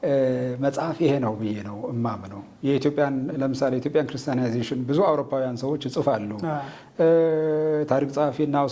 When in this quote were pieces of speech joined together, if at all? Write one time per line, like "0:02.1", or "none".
none